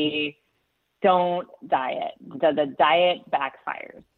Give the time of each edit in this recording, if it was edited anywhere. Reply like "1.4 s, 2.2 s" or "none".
none